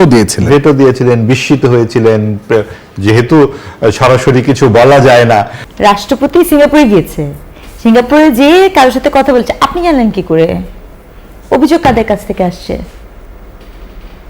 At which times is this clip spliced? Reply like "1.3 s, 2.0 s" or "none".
5.6 s